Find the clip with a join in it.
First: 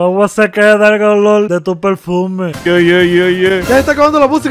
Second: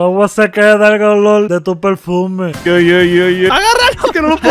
second; 1 cut; at 3.5 s

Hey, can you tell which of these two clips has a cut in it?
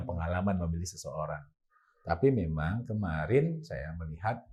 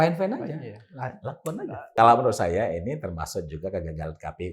second; 1 cut; at 1.9 s

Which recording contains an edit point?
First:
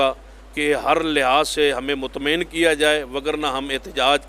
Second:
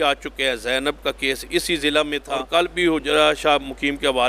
second; 1 cut; at 2.3 s

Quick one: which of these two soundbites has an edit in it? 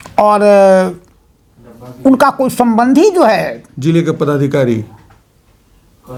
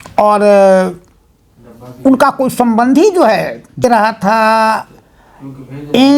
second; 1 cut; at 3.8 s

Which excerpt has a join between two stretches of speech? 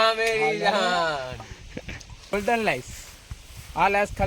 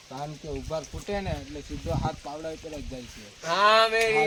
first; 1 cut; at 2.3 s

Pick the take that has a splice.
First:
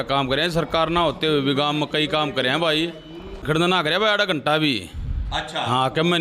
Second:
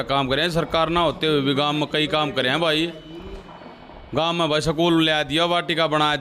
first; 1 cut; at 3.4 s

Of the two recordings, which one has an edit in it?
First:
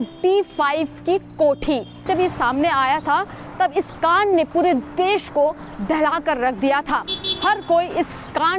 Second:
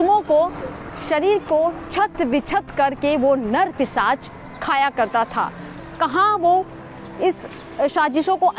first; 1 cut; at 2.1 s

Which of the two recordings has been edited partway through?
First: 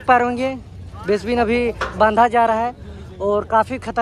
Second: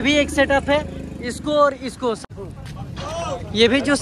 second; 1 cut; at 2.2 s

